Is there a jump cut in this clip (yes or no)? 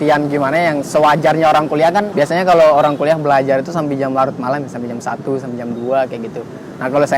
yes